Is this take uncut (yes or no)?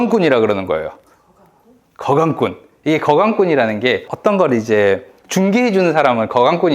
yes